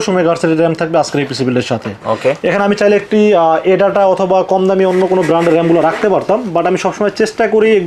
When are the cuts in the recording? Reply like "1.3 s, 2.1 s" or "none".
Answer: none